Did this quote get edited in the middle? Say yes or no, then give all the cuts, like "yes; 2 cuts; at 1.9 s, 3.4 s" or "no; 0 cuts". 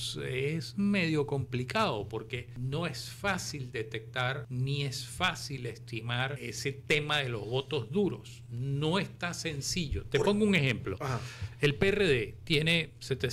yes; 3 cuts; at 2.5 s, 4.5 s, 6.4 s